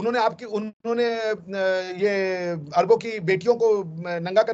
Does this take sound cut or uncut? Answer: uncut